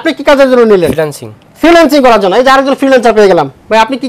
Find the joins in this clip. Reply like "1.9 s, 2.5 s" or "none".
none